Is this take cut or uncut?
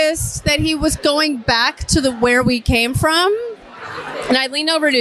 uncut